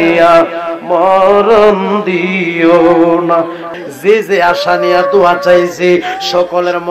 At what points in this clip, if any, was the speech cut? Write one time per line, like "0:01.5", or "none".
0:03.6